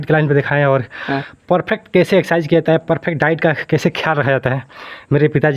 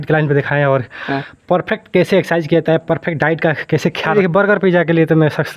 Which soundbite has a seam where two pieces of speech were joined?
second; 1 cut; at 4.1 s

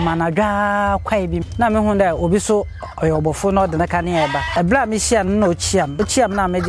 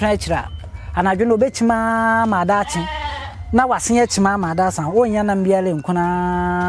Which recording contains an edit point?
first; 3 cuts; at 1.5 s, 4.4 s, 5.9 s

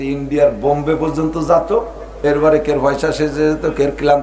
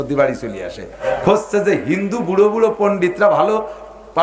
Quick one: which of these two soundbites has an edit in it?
second; 1 cut; at 1.1 s

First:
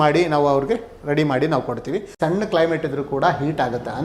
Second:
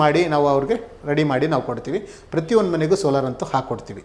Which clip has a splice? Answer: first; 1 cut; at 2.1 s

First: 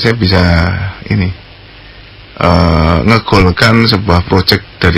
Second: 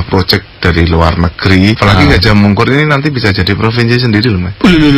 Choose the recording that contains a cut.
second; 1 cut; at 1.8 s

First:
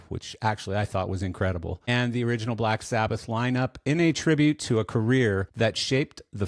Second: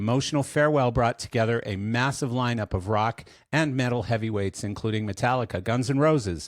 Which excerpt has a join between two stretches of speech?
first; 2 cuts; at 1.9 s, 5.5 s

